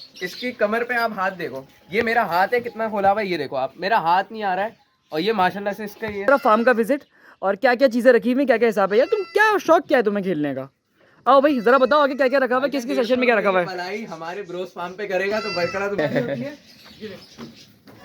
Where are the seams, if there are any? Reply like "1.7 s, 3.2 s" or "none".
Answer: 6.3 s, 16.0 s